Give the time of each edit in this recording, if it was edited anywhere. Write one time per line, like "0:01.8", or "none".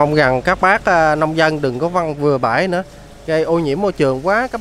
none